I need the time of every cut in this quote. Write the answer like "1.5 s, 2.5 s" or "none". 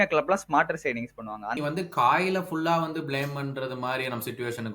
1.6 s